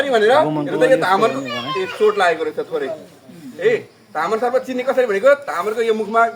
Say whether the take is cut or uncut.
uncut